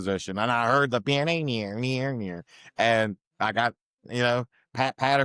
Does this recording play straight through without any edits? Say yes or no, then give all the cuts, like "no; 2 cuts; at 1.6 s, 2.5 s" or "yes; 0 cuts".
yes; 0 cuts